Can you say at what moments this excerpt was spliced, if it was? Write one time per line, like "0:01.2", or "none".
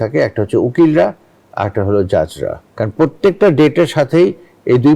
0:02.6